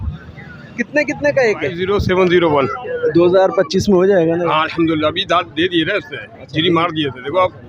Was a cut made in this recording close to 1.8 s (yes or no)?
yes